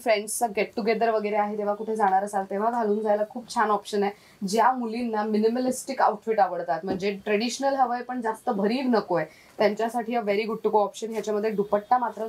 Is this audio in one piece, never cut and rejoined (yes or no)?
yes